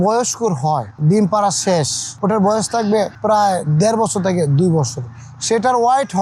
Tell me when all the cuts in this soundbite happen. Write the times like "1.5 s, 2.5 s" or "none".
0.9 s, 2.0 s, 3.2 s